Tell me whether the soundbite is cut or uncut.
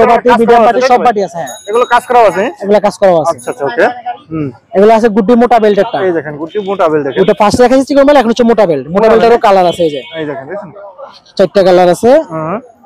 uncut